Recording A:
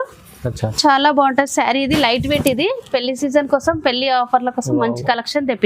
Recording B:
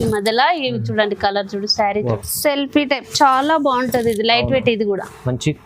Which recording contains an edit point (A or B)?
B